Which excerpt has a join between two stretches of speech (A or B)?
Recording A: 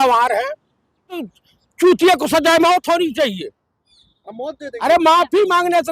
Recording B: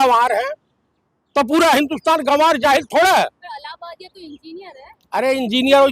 A